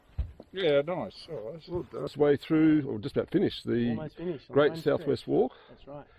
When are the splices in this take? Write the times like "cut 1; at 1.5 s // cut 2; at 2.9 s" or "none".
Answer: cut 1; at 2.1 s